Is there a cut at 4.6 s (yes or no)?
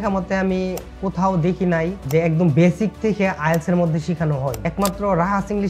yes